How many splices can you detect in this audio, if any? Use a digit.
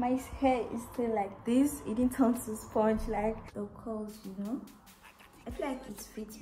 1